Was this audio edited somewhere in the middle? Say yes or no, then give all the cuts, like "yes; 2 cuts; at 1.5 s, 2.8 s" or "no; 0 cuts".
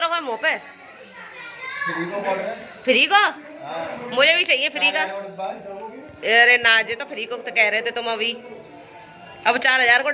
no; 0 cuts